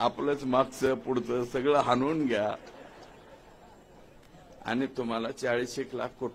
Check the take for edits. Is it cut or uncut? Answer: uncut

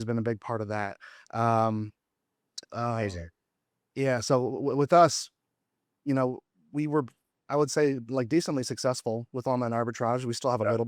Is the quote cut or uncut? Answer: uncut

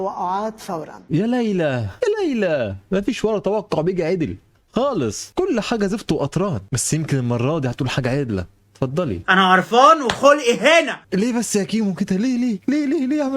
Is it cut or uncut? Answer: cut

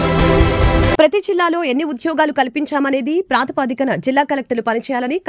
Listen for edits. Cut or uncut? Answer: uncut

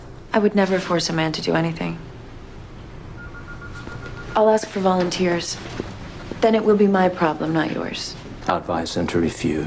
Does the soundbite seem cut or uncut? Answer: cut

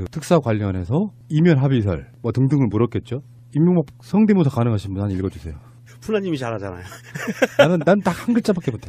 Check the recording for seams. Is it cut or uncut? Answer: uncut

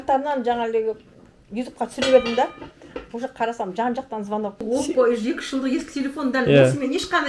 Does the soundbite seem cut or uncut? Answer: cut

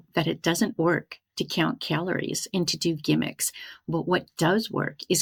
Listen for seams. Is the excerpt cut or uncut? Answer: uncut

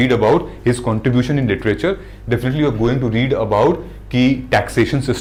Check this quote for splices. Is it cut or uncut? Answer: uncut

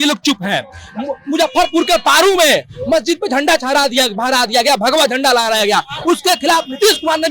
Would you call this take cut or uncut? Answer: uncut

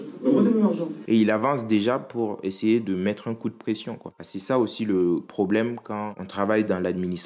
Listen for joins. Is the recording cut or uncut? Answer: cut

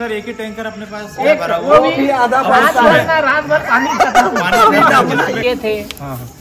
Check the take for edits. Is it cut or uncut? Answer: cut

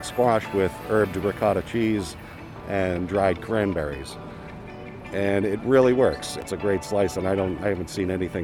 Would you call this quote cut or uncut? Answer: cut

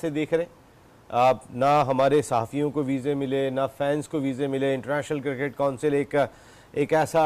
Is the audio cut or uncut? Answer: uncut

